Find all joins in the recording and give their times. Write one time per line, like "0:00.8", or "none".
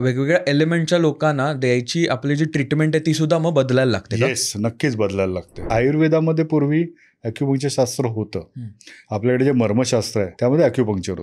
0:05.7
0:10.3